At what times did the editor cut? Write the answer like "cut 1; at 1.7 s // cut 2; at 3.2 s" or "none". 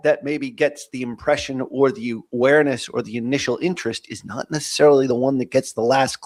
none